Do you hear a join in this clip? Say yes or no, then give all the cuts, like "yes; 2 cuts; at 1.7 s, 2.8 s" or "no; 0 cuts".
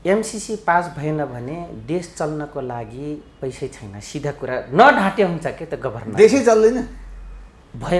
no; 0 cuts